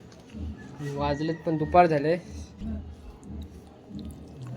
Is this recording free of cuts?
no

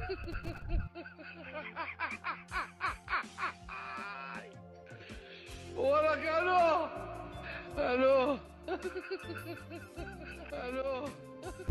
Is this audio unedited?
yes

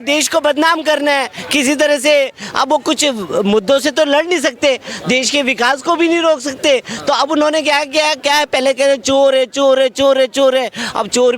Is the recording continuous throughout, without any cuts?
yes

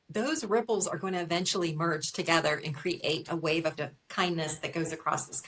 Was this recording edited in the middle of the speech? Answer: yes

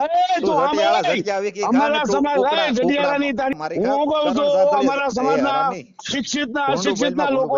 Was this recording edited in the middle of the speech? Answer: yes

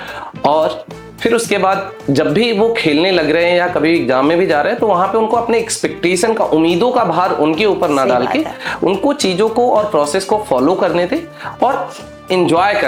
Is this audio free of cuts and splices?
yes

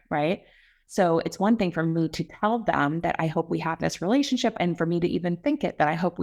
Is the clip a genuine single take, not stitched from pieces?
no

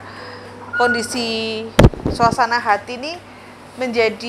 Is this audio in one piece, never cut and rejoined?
yes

